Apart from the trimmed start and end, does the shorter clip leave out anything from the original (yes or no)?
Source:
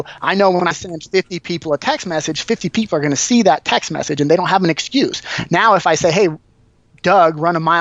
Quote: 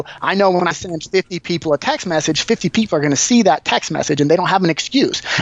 no